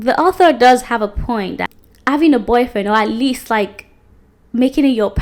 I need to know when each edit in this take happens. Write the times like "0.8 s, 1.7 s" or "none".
none